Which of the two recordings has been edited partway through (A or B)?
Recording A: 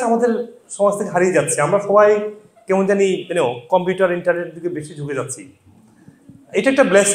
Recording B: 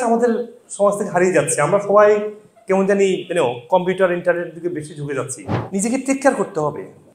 B